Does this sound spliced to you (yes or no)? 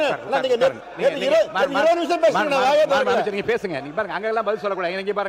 no